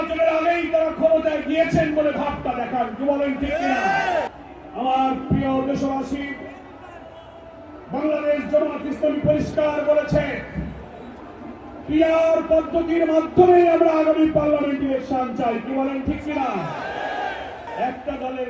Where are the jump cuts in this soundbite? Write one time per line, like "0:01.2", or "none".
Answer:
0:04.3
0:17.7